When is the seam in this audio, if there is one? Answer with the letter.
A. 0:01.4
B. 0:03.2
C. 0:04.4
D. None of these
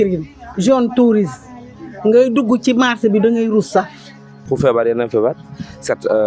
C